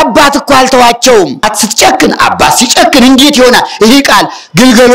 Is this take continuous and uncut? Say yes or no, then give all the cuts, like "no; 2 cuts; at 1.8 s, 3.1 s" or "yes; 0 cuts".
no; 1 cut; at 1.5 s